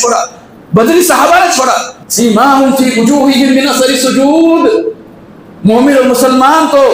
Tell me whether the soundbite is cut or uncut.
cut